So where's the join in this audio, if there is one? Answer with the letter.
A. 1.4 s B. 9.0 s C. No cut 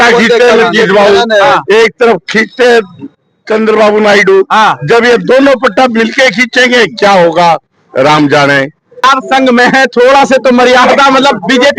B